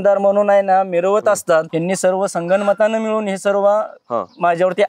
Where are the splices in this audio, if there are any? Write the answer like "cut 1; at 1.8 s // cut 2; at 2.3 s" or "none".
cut 1; at 1.7 s